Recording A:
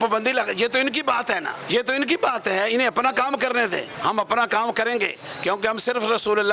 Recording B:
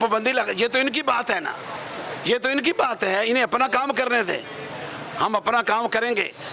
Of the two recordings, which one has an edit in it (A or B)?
A